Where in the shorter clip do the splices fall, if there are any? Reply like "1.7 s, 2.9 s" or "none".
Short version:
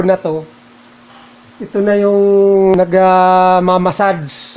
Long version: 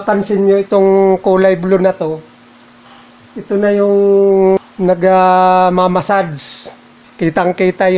2.8 s